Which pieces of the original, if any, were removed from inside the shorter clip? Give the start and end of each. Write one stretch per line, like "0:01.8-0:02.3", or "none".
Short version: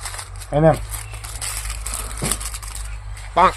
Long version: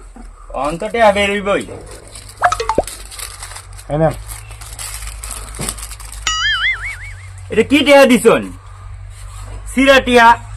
none